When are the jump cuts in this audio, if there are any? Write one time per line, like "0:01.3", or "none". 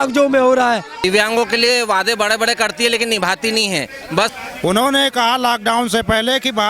0:00.9
0:04.3